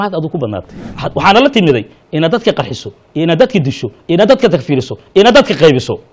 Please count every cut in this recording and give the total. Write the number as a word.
one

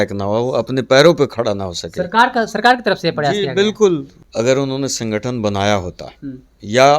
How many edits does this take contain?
one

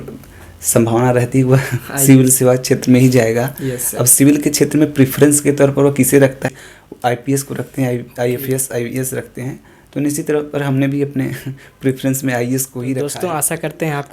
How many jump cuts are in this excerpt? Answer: two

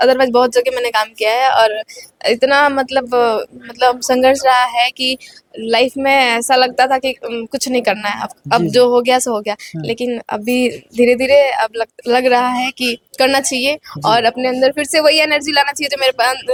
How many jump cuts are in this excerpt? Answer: zero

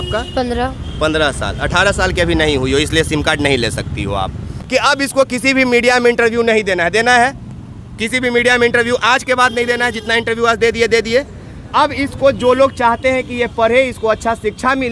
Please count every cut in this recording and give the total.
one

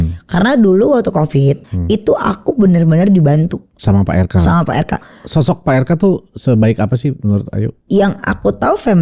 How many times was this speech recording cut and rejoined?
four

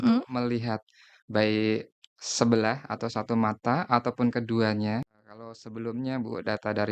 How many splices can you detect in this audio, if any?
one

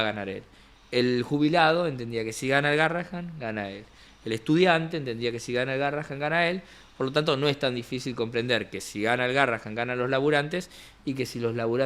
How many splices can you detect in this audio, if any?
zero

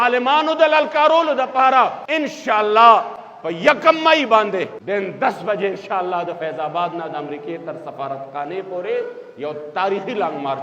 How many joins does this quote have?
two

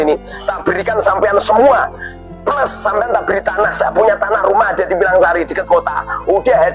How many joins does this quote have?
zero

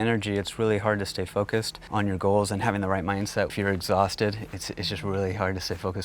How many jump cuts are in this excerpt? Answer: two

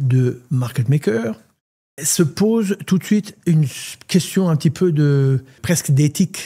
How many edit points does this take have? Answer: two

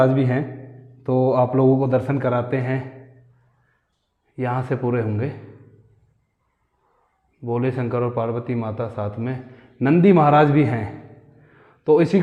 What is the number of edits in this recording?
zero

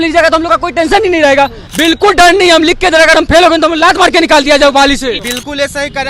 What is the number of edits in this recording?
two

